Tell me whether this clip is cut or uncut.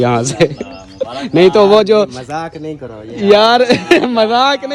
uncut